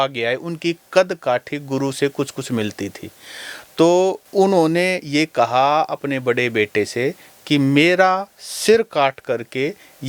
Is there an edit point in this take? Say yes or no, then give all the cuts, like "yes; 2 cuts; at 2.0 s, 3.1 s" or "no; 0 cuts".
no; 0 cuts